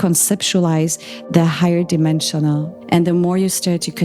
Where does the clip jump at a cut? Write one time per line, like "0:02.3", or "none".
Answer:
0:02.7